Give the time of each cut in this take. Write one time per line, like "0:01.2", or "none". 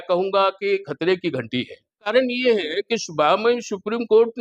0:02.1